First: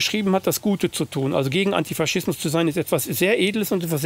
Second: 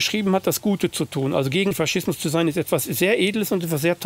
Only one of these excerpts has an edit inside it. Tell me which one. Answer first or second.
second